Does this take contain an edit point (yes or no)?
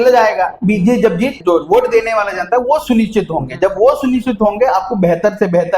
yes